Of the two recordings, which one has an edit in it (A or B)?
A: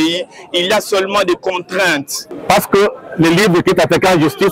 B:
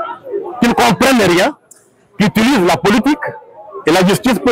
A